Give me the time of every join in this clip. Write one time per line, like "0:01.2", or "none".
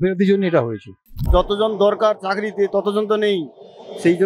0:01.2